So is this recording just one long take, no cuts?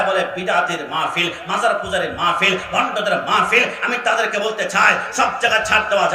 yes; 0 cuts

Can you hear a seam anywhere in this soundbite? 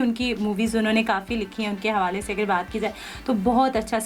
no; 0 cuts

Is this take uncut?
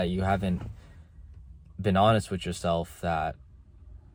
yes; 0 cuts

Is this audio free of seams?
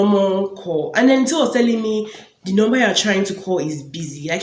yes; 0 cuts

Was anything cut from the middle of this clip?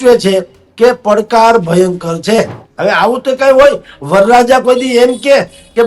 yes; 1 cut; at 2.6 s

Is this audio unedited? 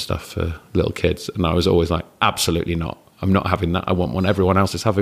yes; 0 cuts

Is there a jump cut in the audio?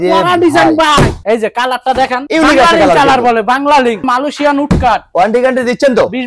yes; 2 cuts; at 1.2 s, 4.0 s

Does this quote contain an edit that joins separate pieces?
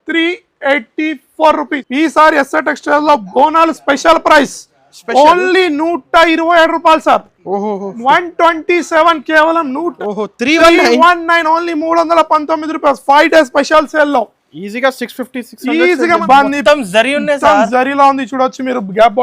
yes; 3 cuts; at 1.8 s, 9.9 s, 16.2 s

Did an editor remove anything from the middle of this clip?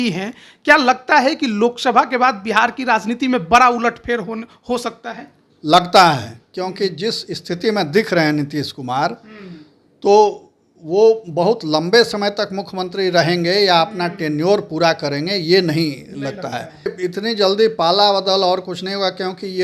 yes; 1 cut; at 16.9 s

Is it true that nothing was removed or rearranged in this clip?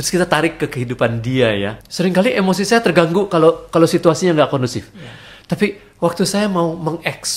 no; 1 cut; at 1.8 s

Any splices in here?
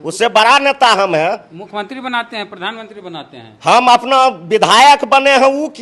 no; 0 cuts

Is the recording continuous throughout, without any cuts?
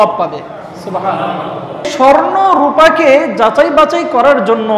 no; 1 cut; at 1.9 s

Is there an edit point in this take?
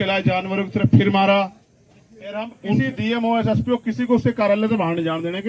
yes; 1 cut; at 2.6 s

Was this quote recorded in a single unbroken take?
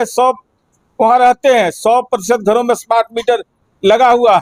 yes; 0 cuts

